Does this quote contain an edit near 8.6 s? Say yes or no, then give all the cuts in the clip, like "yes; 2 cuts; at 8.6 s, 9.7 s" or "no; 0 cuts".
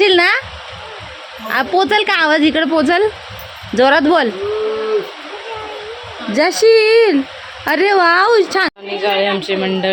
yes; 1 cut; at 8.6 s